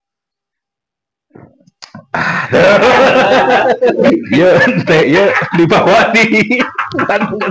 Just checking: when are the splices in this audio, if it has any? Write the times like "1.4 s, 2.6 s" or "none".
4.0 s